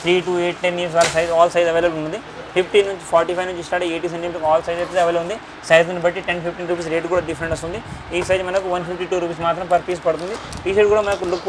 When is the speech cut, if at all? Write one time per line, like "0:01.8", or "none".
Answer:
none